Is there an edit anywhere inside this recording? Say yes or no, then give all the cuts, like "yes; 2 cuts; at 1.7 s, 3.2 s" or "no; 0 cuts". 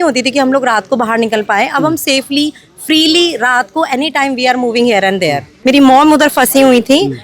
yes; 1 cut; at 5.5 s